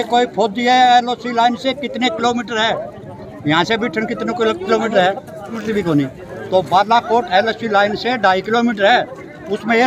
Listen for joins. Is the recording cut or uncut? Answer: uncut